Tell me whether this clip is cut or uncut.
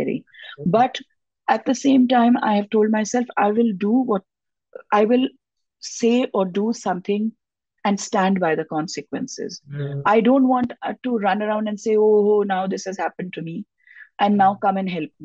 uncut